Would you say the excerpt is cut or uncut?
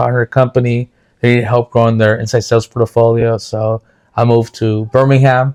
uncut